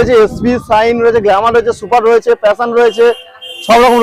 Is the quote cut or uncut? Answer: uncut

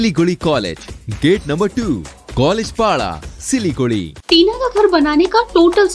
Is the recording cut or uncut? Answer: cut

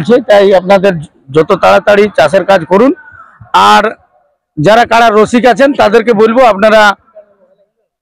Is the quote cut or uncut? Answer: uncut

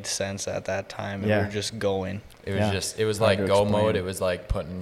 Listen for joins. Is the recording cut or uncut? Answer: uncut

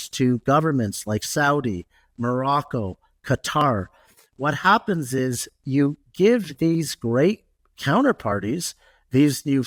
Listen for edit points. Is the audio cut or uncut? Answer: uncut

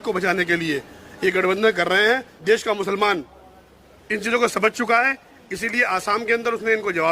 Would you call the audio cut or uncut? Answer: cut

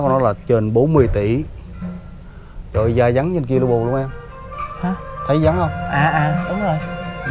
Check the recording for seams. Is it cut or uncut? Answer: uncut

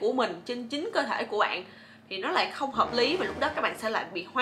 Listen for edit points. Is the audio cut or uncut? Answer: uncut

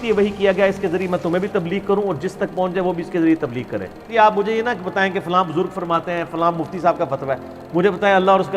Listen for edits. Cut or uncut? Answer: cut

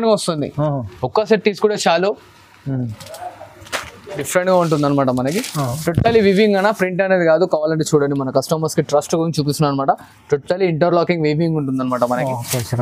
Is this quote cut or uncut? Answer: cut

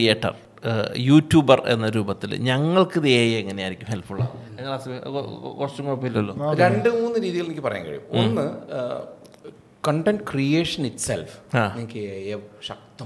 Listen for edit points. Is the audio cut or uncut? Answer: uncut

